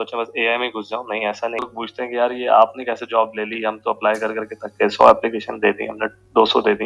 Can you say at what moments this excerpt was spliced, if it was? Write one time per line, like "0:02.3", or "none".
0:01.7